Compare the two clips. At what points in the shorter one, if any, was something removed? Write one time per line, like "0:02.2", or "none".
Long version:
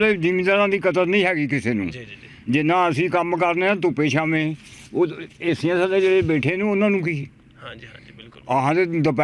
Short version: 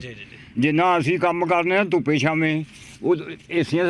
none